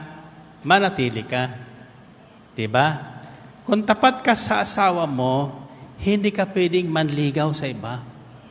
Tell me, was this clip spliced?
no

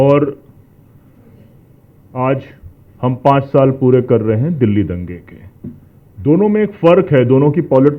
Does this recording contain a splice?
no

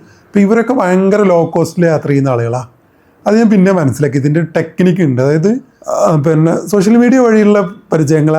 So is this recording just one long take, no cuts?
no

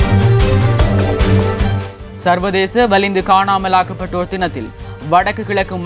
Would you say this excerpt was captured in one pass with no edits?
no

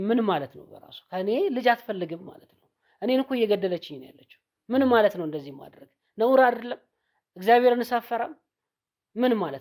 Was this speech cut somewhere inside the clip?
no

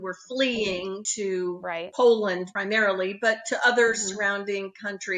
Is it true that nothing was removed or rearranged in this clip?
yes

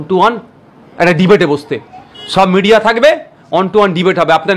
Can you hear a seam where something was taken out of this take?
no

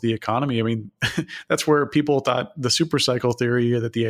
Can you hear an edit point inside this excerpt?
no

